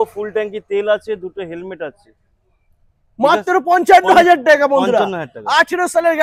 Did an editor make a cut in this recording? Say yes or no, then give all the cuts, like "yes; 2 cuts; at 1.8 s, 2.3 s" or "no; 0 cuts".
no; 0 cuts